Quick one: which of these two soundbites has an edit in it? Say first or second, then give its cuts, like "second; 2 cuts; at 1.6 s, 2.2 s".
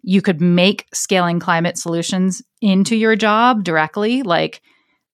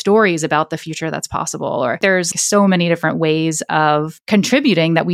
second; 2 cuts; at 2.3 s, 4.2 s